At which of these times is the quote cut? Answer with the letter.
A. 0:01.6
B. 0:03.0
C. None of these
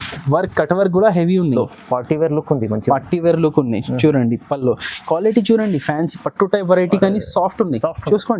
A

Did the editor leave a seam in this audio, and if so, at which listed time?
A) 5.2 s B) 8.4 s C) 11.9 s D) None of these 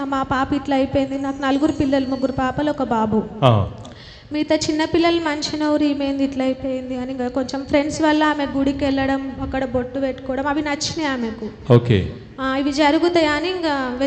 D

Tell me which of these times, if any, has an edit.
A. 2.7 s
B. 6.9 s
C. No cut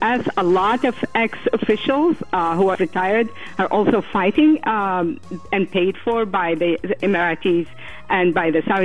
A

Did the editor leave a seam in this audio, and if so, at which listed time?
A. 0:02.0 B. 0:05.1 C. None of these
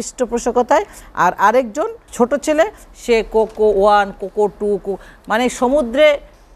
A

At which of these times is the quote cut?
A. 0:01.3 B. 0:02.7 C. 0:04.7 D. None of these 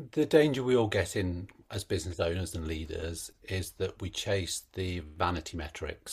D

